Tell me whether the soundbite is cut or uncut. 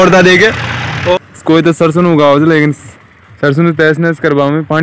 cut